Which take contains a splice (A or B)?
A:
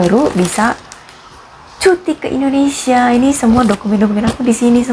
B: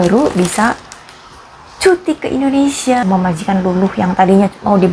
B